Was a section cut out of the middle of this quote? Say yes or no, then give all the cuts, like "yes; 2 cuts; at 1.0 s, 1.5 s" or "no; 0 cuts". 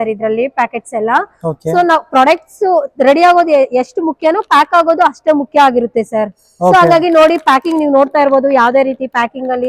no; 0 cuts